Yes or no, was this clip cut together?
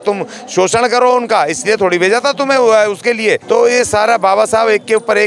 yes